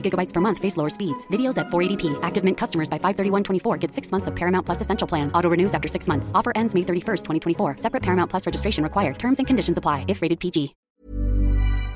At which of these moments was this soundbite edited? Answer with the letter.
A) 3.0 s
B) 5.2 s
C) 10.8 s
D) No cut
C